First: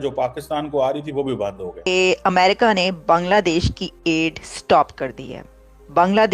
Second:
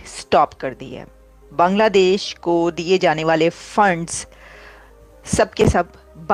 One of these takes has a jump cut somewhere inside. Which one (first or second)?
first